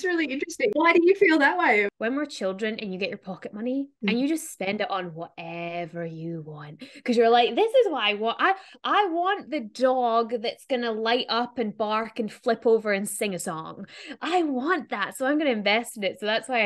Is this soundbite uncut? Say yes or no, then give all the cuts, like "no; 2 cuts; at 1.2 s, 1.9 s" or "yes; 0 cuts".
no; 3 cuts; at 0.7 s, 1.9 s, 3.9 s